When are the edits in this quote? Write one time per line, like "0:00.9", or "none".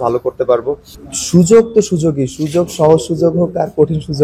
0:00.9